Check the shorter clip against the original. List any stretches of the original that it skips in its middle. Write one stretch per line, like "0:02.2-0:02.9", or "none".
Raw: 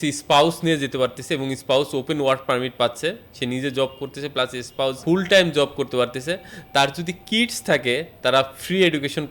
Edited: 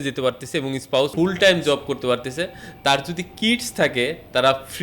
0:01.9-0:05.0